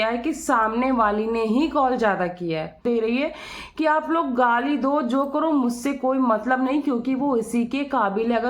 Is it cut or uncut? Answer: cut